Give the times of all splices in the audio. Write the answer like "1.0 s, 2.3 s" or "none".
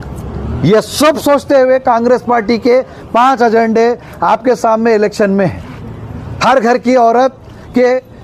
none